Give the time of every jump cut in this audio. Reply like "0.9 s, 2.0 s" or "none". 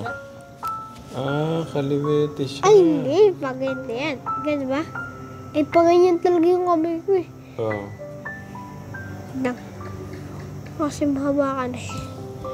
none